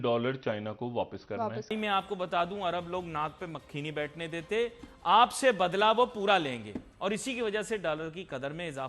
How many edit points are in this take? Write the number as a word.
one